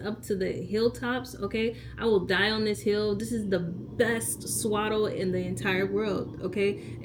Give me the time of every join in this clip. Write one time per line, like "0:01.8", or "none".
none